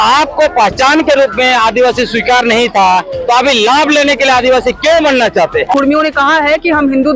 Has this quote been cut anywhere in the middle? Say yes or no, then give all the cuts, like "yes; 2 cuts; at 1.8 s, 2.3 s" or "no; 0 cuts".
yes; 1 cut; at 5.7 s